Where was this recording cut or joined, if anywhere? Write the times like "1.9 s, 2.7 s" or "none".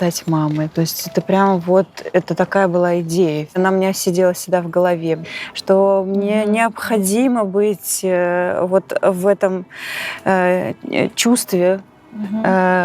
3.6 s, 5.2 s